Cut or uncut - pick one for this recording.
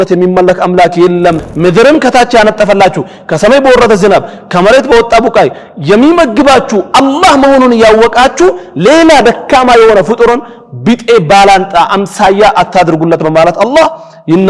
cut